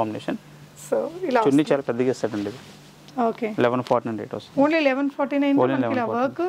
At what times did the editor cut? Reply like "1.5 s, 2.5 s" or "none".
none